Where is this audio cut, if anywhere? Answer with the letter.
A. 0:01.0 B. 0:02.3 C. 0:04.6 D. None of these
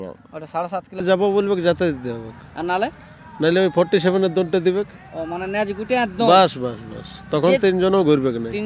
A